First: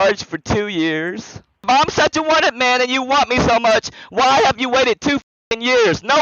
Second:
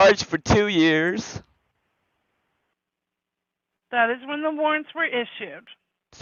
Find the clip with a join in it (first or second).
first